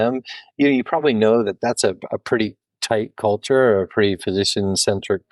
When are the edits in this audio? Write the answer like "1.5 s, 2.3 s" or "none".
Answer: none

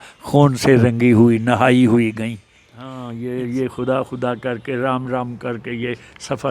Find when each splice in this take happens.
3.0 s

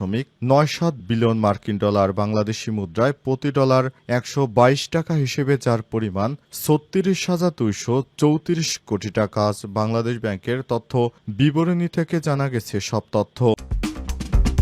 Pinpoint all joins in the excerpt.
13.7 s

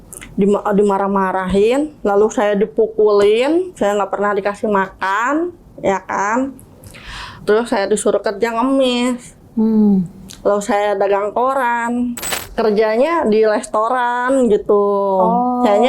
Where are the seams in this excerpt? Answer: 12.4 s

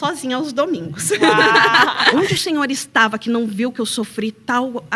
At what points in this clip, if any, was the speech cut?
2.1 s

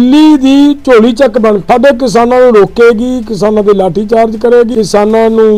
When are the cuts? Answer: 0.8 s, 1.6 s, 4.7 s

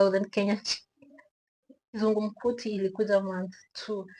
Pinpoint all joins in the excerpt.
2.0 s

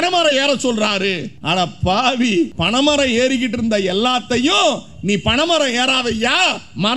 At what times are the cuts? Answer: 1.3 s, 2.6 s

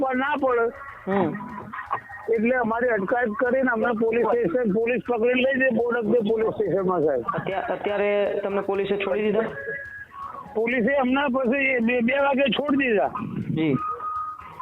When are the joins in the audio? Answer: 7.2 s

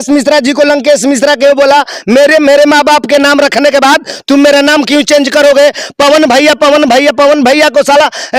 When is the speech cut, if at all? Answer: none

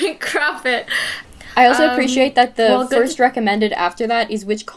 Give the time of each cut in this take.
1.2 s

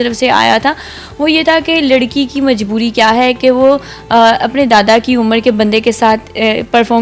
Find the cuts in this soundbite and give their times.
none

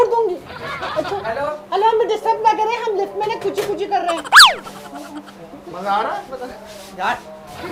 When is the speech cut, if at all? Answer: none

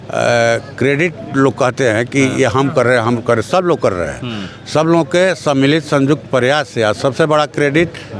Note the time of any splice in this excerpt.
none

